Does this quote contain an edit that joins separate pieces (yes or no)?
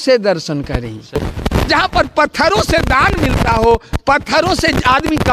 yes